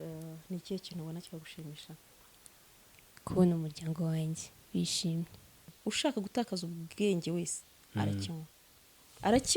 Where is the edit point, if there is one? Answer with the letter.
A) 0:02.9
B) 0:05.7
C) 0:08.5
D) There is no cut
B